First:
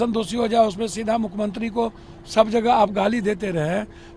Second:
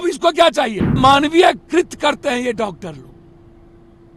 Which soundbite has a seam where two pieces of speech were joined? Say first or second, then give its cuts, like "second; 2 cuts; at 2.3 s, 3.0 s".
second; 1 cut; at 1.0 s